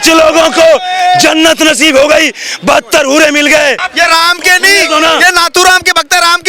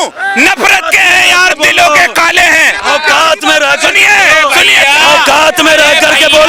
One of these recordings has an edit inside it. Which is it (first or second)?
first